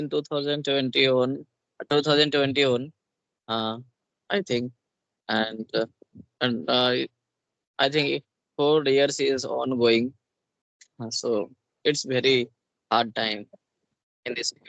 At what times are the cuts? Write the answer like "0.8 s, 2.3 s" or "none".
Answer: none